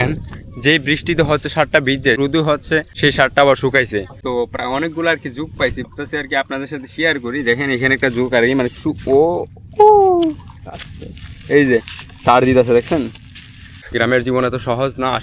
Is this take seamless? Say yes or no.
no